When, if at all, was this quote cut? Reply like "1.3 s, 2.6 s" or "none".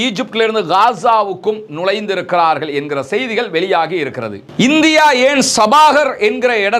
4.5 s